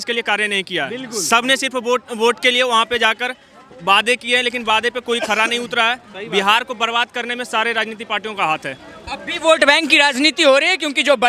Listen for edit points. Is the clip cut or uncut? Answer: uncut